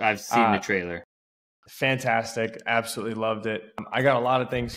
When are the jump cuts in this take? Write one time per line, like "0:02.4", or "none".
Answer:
0:03.8